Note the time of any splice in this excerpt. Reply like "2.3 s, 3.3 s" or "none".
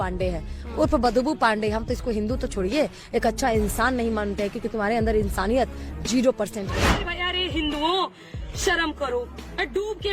7.0 s